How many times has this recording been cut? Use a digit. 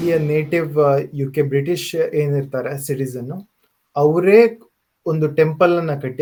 0